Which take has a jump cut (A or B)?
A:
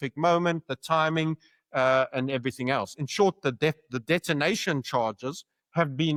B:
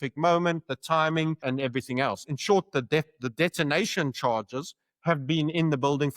B